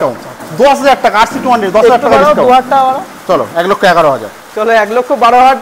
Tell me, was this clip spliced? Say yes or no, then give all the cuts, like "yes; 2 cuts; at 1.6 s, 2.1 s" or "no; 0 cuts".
no; 0 cuts